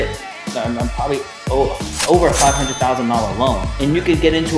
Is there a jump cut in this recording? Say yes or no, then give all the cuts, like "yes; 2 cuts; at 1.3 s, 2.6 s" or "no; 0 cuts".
yes; 1 cut; at 3.7 s